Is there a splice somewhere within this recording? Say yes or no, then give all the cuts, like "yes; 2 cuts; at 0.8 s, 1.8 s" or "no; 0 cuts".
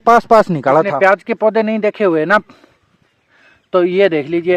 yes; 1 cut; at 0.9 s